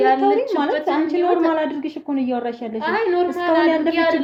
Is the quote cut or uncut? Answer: uncut